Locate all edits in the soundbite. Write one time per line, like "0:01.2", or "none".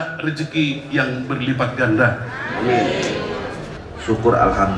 0:03.6